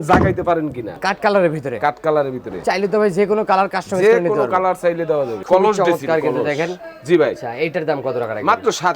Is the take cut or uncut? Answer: cut